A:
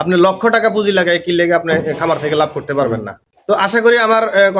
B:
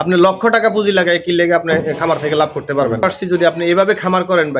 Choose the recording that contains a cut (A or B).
B